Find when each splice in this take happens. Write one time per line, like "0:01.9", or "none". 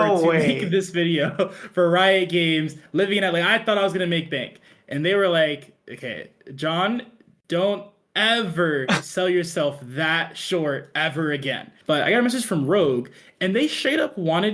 0:11.7

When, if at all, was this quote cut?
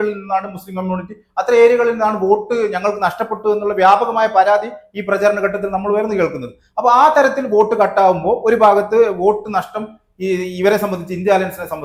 none

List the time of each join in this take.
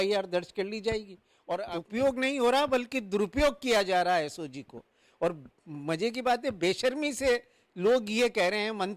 0:01.6

